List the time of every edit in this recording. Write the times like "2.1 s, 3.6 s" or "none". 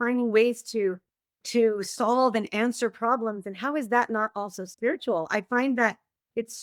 none